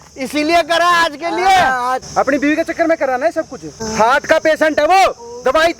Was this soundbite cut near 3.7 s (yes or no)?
yes